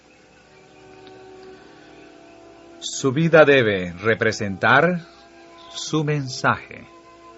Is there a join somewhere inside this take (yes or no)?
yes